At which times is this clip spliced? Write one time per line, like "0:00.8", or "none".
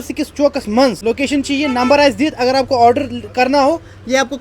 0:01.0